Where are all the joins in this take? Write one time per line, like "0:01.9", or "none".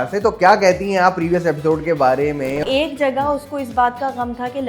0:02.6